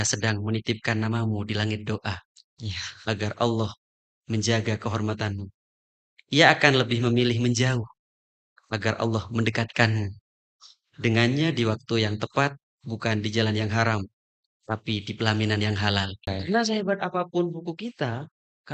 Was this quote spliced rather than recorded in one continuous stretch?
yes; 1 cut; at 16.4 s

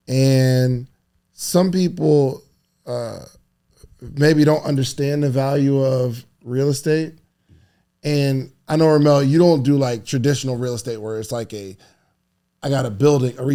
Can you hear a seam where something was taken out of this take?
no; 0 cuts

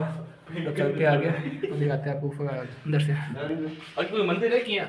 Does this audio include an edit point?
no; 0 cuts

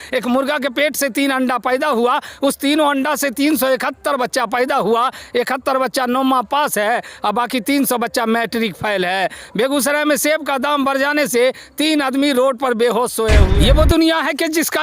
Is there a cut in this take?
yes; 1 cut; at 13.5 s

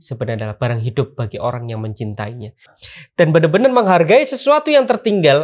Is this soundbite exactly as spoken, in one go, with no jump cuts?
no; 1 cut; at 2.8 s

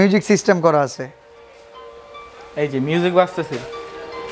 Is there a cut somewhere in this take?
no; 0 cuts

